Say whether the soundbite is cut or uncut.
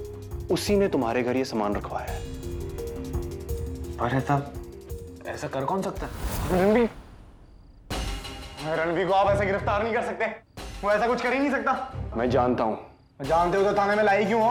uncut